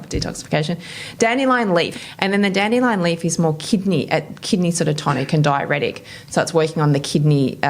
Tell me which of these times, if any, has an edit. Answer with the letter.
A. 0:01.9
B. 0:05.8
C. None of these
A